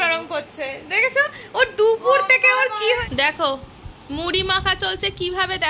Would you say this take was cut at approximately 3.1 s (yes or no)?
yes